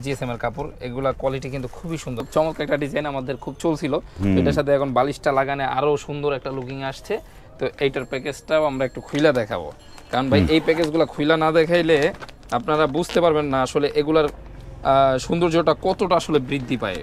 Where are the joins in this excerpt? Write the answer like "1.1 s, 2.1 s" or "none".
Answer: 2.2 s